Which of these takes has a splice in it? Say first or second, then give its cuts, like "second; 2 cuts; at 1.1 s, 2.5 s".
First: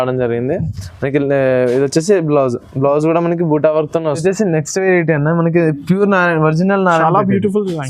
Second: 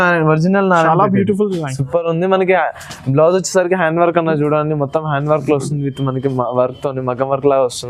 first; 1 cut; at 4.2 s